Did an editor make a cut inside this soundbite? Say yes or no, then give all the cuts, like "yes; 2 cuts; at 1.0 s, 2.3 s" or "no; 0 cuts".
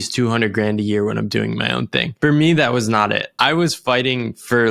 yes; 2 cuts; at 2.1 s, 3.3 s